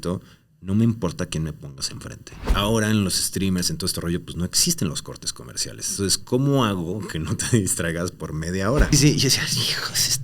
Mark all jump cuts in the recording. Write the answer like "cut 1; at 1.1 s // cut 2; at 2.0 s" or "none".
cut 1; at 2.5 s // cut 2; at 5.8 s // cut 3; at 8.9 s